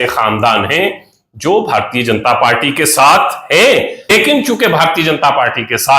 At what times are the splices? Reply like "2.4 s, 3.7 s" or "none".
4.1 s